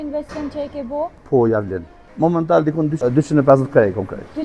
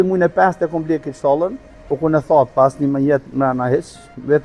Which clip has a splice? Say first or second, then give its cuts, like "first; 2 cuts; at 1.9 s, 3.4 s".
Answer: first; 3 cuts; at 1.2 s, 2.0 s, 3.0 s